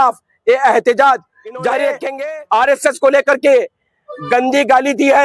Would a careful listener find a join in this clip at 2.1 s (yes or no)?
yes